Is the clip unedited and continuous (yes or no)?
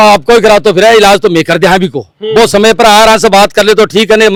yes